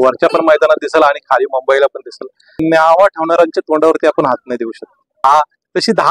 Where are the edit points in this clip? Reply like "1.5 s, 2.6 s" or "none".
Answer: 2.6 s, 5.2 s